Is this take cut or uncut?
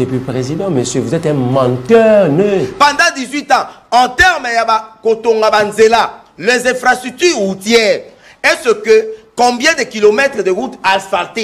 cut